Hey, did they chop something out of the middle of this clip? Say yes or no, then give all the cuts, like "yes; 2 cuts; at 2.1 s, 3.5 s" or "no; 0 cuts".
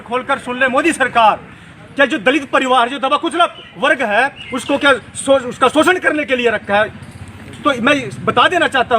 yes; 1 cut; at 1.6 s